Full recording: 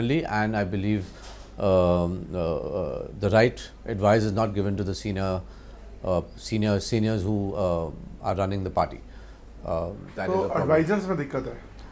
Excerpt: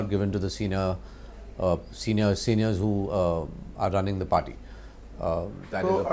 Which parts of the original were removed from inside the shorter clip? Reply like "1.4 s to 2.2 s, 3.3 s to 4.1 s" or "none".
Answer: none